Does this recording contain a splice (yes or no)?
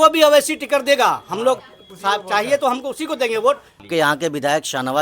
yes